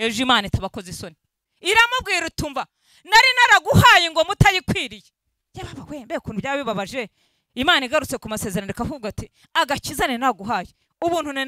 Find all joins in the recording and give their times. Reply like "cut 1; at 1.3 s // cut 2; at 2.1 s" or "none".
cut 1; at 1.4 s